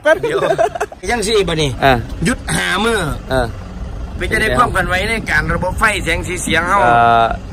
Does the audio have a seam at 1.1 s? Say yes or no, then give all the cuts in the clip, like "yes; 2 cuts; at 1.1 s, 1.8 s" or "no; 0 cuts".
yes; 1 cut; at 1.1 s